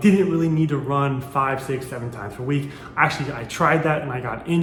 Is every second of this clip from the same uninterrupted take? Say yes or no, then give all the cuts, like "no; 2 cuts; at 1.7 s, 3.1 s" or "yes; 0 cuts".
yes; 0 cuts